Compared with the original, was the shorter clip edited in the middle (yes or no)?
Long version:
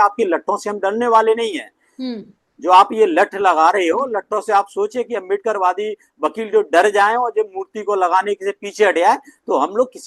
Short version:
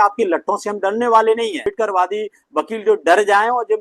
yes